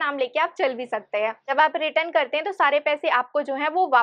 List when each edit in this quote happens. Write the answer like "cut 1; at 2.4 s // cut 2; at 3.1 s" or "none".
cut 1; at 1.5 s